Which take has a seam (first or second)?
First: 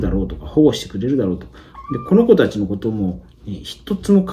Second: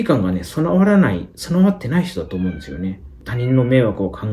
second